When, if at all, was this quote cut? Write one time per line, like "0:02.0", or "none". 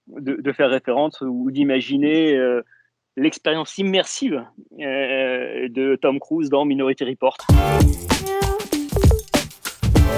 0:07.4

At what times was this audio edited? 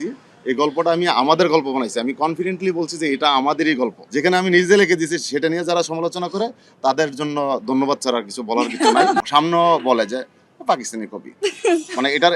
0:04.0
0:09.3

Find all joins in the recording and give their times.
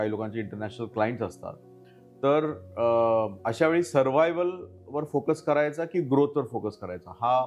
none

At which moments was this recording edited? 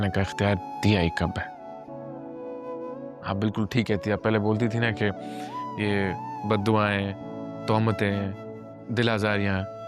none

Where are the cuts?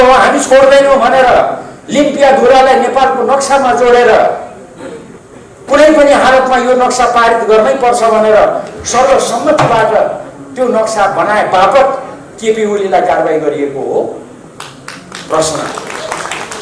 none

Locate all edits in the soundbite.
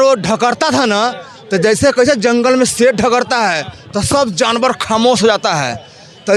none

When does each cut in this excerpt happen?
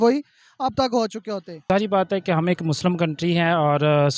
0:01.6

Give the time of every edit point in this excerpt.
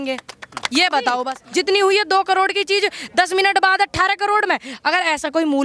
0:01.4

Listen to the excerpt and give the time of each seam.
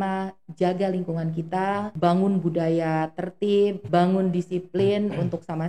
0:01.9
0:03.8

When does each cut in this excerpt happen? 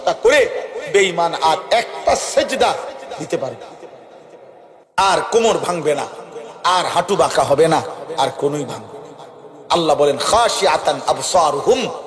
0:04.8

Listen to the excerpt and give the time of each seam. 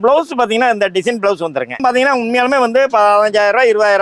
0:01.8

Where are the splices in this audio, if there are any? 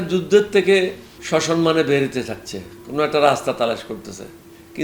0:01.1

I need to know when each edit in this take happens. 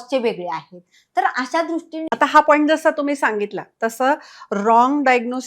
0:02.1

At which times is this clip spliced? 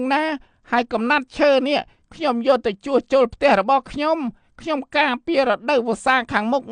none

